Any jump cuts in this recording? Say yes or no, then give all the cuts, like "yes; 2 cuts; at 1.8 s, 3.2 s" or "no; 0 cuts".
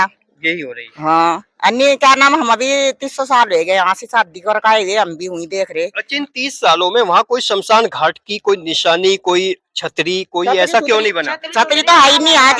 no; 0 cuts